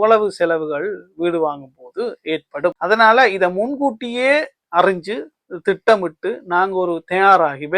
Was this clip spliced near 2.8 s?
yes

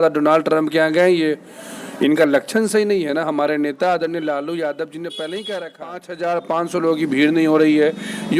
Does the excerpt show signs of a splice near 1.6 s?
no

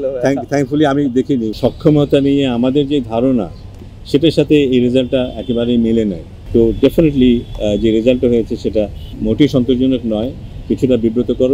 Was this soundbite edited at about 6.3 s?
yes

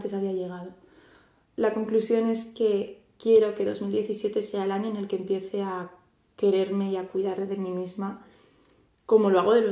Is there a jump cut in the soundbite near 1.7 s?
yes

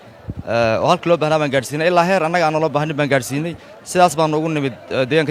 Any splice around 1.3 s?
no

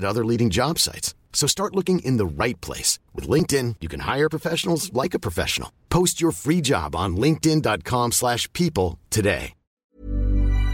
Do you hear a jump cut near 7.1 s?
no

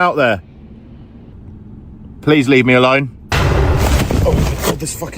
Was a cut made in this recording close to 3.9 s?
no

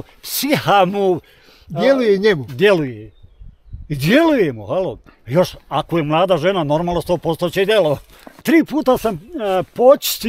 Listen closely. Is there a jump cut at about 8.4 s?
yes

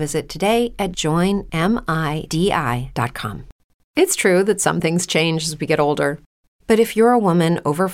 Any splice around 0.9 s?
yes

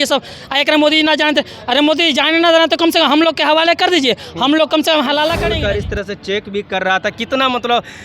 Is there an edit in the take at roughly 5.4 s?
yes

